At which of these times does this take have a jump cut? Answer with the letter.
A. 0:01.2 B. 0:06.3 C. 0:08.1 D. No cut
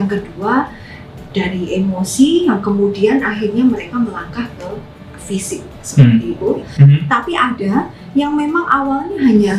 B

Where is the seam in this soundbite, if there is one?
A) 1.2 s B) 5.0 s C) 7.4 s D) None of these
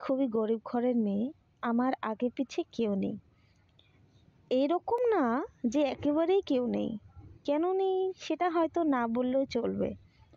D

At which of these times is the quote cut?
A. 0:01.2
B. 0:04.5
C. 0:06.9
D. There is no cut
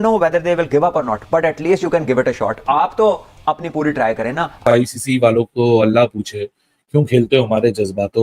B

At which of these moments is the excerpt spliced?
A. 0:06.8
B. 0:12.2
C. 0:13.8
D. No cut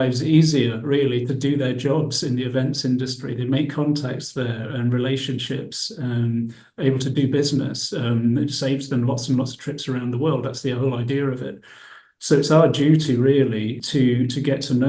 C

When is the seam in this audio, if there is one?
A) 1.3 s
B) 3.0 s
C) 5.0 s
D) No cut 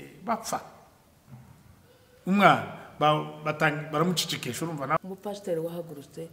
C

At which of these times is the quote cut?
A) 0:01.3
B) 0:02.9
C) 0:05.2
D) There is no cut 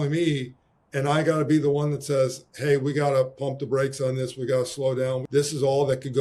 C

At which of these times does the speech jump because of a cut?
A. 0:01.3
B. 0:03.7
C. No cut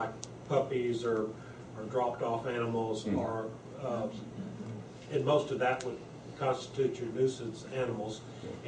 B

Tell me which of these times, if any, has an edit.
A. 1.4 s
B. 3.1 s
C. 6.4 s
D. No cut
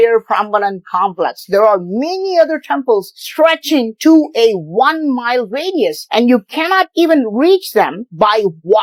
D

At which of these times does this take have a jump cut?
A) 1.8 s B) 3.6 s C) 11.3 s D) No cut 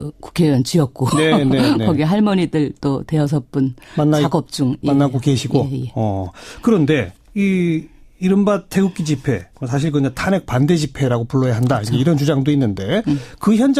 A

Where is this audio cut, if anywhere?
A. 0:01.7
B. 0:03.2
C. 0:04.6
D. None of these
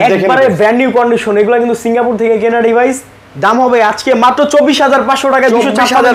D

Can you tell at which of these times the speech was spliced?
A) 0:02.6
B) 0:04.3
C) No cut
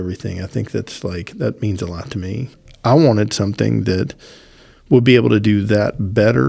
A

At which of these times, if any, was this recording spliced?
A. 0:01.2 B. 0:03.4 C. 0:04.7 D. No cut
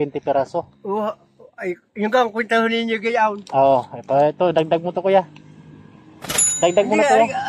A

